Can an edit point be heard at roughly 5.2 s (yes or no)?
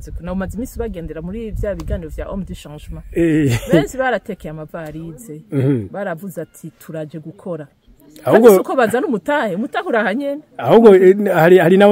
no